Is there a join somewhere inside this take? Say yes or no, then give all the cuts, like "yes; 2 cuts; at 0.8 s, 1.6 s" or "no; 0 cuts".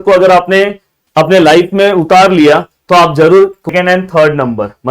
yes; 1 cut; at 3.7 s